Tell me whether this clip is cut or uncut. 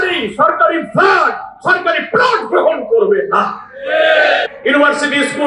cut